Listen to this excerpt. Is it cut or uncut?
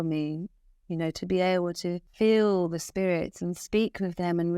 cut